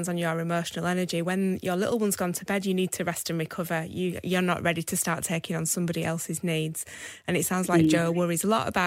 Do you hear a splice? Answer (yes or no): no